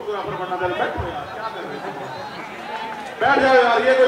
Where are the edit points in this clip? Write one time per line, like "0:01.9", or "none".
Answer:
none